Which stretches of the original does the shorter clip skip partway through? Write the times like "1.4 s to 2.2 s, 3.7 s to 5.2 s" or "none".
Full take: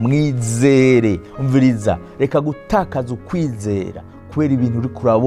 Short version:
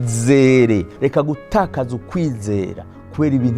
1.2 s to 2.1 s